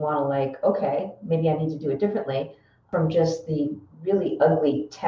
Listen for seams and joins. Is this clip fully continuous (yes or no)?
no